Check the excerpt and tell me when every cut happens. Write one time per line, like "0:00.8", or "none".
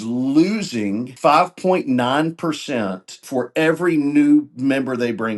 0:01.1
0:03.2